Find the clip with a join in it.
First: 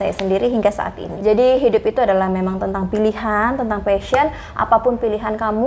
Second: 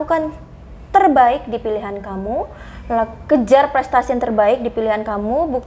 first; 1 cut; at 1.0 s

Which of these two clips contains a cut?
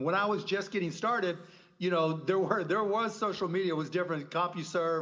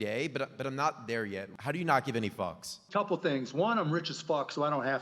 second; 2 cuts; at 1.5 s, 2.8 s

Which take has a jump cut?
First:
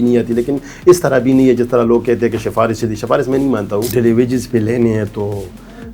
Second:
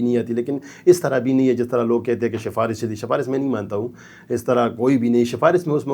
first; 1 cut; at 3.9 s

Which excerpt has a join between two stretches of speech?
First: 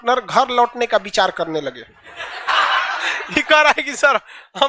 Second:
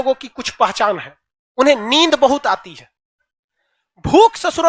first; 1 cut; at 2.4 s

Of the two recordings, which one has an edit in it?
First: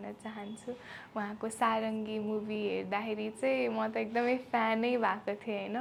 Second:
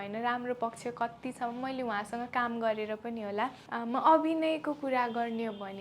second; 1 cut; at 3.6 s

